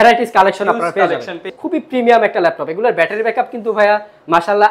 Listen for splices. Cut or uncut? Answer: cut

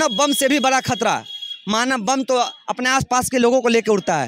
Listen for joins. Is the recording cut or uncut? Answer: uncut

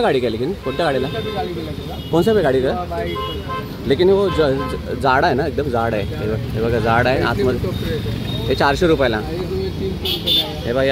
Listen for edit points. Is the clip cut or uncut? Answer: uncut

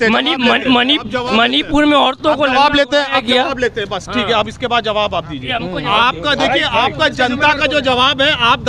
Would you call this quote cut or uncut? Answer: uncut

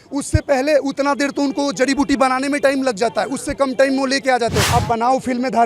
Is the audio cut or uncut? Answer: cut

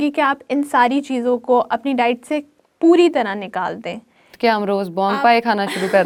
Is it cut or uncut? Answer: uncut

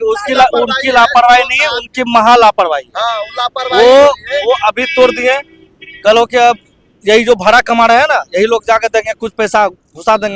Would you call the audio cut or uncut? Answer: uncut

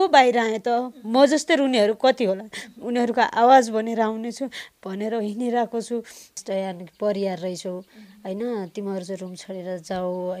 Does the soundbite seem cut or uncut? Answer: cut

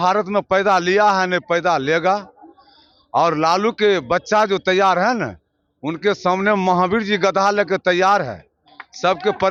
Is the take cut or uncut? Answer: uncut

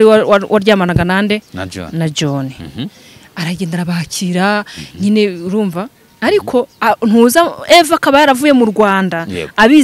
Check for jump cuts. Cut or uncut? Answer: uncut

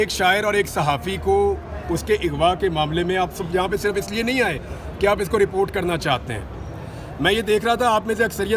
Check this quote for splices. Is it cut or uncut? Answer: uncut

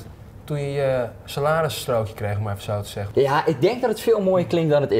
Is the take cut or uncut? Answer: uncut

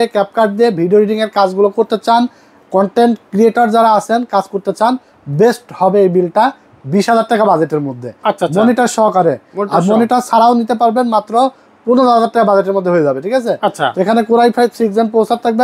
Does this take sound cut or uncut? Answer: uncut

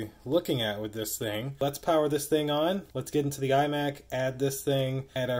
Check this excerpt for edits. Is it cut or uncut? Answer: cut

